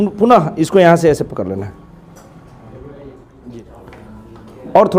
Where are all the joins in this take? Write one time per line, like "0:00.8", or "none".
0:03.6